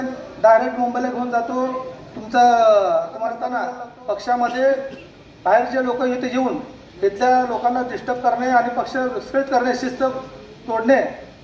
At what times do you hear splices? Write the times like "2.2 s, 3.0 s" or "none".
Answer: 3.6 s